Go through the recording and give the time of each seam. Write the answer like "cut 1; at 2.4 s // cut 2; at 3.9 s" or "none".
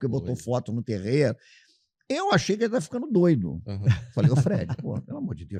none